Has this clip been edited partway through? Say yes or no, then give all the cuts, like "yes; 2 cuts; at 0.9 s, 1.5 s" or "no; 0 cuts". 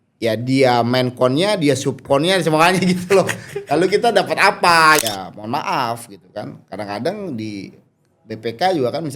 yes; 1 cut; at 5.0 s